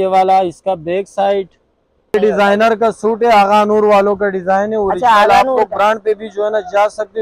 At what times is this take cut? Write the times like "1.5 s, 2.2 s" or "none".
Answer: 2.1 s